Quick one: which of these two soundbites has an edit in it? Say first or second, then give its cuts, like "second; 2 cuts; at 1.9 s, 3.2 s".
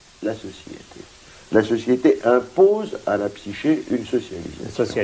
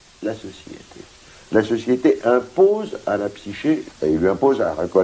first; 1 cut; at 3.9 s